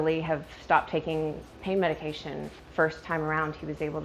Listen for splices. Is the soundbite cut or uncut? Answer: cut